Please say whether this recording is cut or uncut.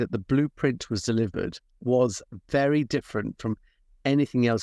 cut